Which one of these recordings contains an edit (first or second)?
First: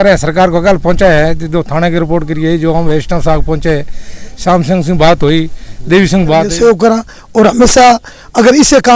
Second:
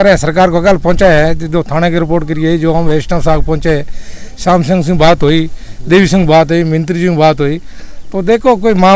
first